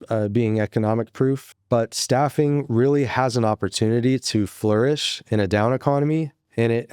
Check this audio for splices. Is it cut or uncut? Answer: cut